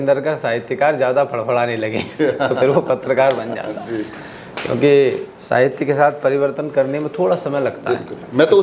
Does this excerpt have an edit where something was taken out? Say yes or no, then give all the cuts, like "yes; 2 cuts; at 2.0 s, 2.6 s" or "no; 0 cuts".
no; 0 cuts